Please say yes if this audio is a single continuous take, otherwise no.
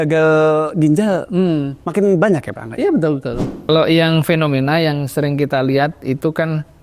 no